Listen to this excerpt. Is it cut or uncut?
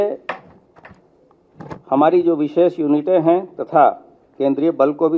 uncut